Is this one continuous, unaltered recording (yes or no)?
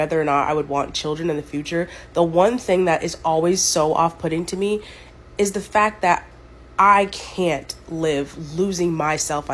yes